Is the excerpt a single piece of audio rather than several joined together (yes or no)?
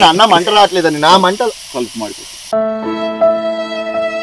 yes